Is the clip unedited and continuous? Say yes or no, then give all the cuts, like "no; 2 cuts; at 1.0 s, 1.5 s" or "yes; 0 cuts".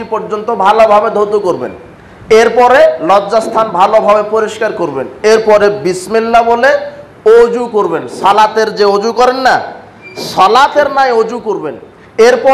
yes; 0 cuts